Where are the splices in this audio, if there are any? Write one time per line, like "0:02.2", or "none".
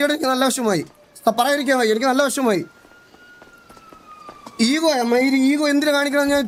none